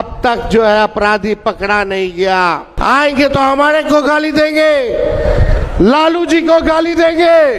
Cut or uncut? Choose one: cut